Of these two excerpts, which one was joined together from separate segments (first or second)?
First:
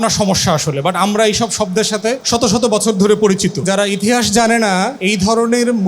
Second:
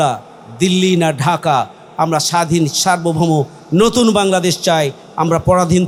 first